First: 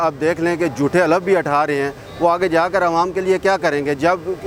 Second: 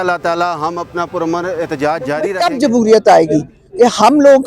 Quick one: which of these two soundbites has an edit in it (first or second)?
second